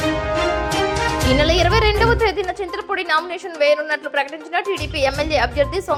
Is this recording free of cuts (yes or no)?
yes